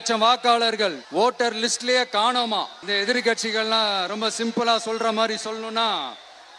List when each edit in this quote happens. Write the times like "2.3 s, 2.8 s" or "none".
1.0 s, 2.8 s